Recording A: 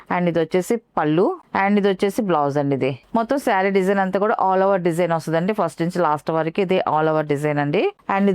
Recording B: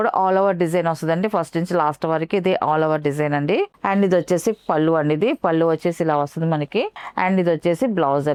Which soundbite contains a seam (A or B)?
A